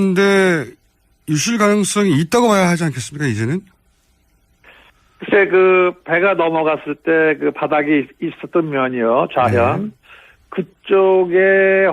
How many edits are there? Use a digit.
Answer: 1